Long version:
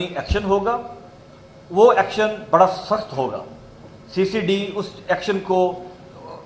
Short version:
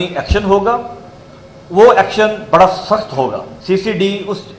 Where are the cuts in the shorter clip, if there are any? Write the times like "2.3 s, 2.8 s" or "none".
3.5 s